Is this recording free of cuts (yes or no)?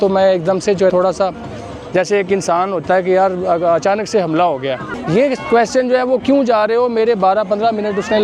no